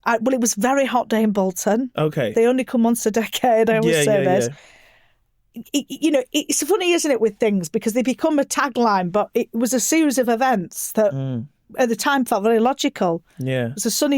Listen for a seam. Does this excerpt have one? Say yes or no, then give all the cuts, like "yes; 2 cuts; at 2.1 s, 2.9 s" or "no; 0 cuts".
no; 0 cuts